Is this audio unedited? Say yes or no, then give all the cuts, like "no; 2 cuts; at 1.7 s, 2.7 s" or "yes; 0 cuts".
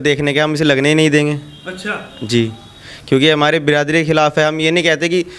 yes; 0 cuts